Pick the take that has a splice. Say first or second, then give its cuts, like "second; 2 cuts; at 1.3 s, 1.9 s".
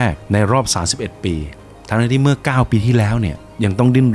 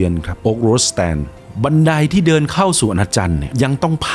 first; 1 cut; at 1.6 s